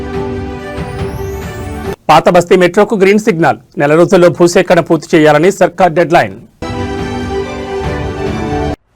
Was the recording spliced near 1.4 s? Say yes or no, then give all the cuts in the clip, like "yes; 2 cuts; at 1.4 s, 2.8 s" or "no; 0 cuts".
no; 2 cuts; at 6.6 s, 8.2 s